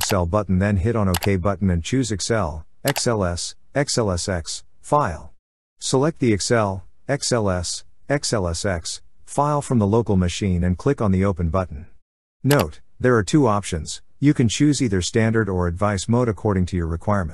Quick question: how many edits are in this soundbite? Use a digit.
0